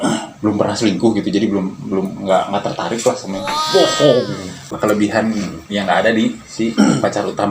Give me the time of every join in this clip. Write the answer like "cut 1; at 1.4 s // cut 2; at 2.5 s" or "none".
cut 1; at 4.7 s